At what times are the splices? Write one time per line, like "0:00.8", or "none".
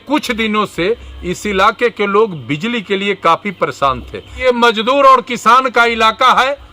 0:04.4